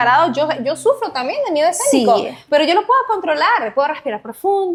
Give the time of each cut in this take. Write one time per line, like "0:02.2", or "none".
none